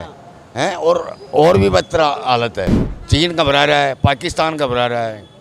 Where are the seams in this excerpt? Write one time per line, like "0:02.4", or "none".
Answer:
0:02.8